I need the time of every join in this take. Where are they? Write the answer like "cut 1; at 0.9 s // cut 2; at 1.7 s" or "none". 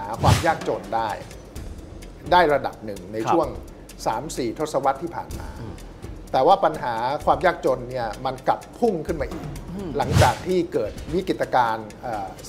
cut 1; at 11.0 s